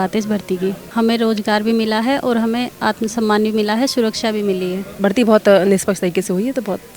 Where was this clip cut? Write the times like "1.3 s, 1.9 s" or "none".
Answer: 0.8 s, 4.9 s